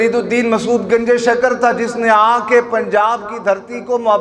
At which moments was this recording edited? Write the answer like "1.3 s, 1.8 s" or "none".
none